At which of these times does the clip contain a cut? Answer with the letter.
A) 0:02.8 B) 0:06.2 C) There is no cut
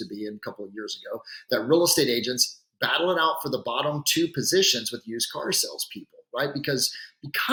C